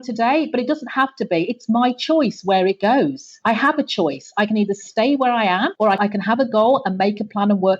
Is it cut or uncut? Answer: cut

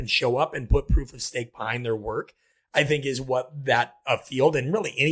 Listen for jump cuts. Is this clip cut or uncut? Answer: uncut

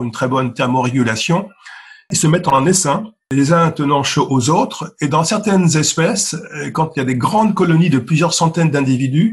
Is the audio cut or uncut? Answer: cut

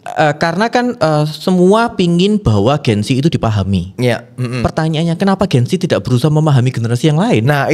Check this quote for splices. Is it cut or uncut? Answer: uncut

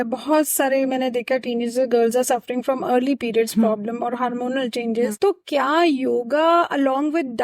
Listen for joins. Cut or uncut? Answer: uncut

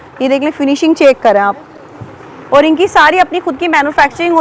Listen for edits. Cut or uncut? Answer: uncut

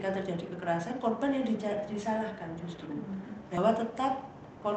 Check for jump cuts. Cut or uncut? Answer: cut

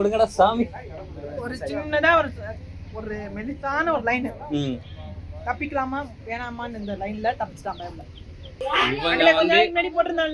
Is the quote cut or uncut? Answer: cut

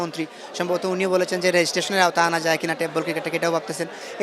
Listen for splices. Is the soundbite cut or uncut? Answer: uncut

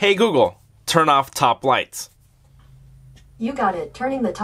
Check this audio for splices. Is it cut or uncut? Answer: uncut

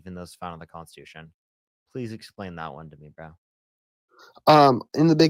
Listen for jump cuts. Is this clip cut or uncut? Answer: uncut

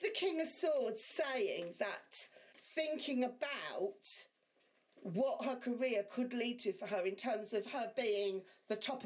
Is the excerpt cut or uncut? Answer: cut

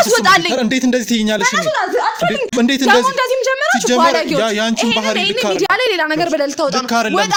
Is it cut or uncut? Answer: uncut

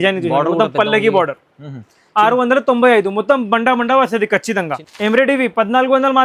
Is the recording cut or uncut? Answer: cut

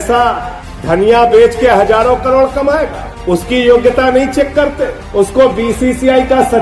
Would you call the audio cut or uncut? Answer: uncut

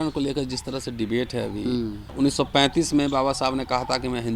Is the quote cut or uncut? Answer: cut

